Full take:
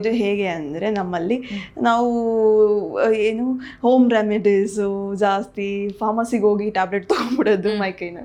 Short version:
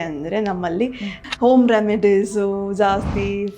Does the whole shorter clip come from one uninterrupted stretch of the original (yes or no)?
no